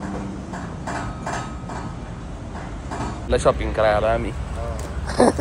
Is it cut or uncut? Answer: cut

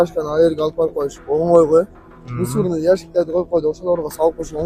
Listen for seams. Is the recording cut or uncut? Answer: uncut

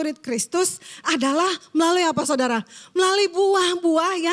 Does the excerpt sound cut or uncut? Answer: uncut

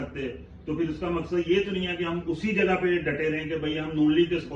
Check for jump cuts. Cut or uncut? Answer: uncut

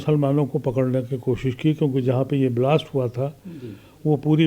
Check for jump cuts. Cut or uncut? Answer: uncut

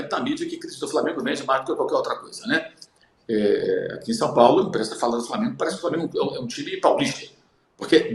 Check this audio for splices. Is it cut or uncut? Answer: uncut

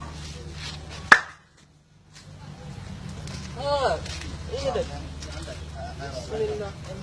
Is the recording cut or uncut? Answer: cut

